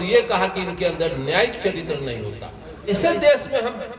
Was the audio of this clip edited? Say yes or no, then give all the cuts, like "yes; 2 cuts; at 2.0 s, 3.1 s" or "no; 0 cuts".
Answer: yes; 1 cut; at 2.9 s